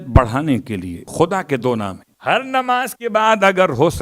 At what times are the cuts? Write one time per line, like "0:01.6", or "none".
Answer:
0:01.1
0:02.1